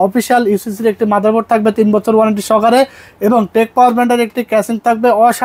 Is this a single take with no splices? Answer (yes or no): yes